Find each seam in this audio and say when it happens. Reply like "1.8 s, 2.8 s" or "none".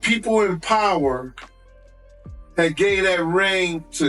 none